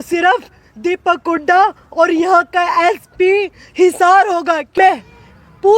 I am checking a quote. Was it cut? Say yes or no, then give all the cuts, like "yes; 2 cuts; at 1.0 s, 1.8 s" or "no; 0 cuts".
yes; 1 cut; at 4.8 s